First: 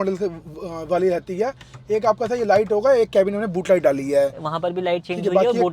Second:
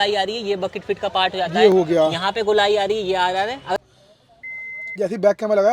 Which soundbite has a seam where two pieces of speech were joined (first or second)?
second